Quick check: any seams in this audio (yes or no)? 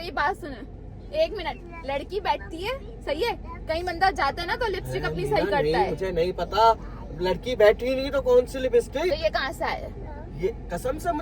no